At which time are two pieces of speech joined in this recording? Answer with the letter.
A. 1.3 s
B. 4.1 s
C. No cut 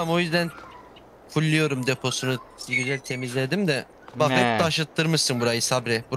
C